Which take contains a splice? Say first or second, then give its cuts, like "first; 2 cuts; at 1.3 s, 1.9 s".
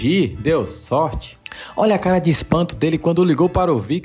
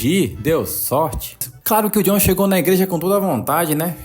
second; 1 cut; at 1.5 s